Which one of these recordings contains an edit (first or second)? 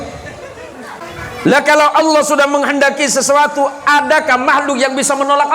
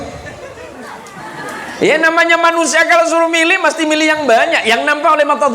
first